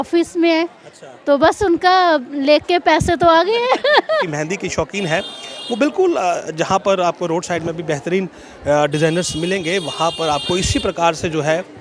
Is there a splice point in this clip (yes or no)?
yes